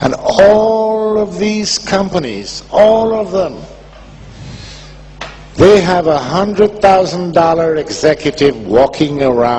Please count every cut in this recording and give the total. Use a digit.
1